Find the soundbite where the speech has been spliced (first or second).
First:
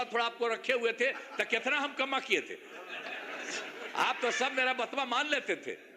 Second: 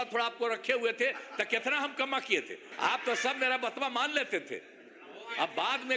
second